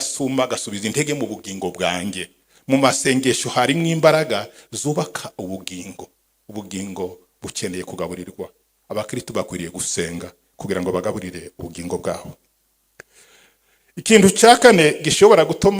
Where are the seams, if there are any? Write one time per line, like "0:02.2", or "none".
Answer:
none